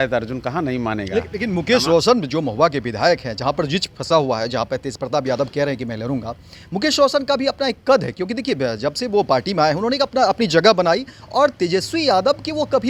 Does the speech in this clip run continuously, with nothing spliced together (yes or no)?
yes